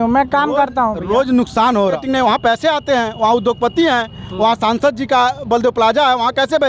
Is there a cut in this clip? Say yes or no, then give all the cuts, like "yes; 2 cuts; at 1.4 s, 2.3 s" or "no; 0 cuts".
yes; 1 cut; at 1.9 s